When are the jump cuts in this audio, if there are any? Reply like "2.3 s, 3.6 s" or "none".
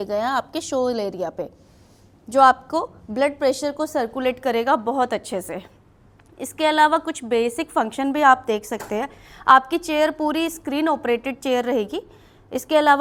none